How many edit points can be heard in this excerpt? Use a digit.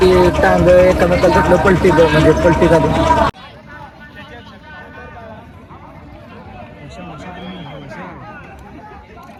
0